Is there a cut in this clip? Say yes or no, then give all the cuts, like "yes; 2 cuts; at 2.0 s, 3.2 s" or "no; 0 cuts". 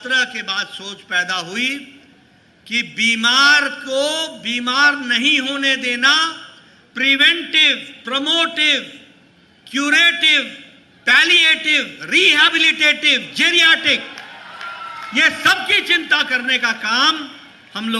no; 0 cuts